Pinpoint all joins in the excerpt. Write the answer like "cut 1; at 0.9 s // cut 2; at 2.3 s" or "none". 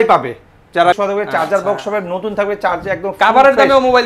cut 1; at 1.0 s